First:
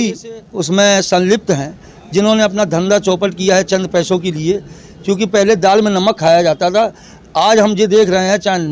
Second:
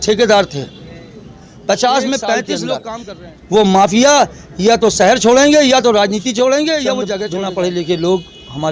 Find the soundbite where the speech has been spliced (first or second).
second